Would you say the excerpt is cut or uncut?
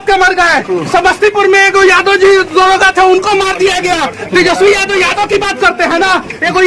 uncut